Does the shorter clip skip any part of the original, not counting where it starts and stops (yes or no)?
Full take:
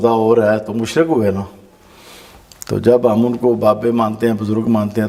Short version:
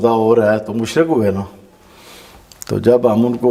no